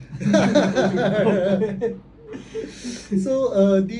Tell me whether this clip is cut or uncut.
uncut